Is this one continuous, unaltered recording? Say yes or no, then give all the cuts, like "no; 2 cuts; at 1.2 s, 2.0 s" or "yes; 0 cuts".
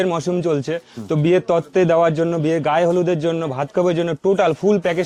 yes; 0 cuts